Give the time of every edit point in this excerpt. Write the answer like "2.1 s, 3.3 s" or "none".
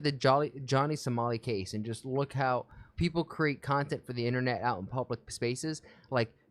2.8 s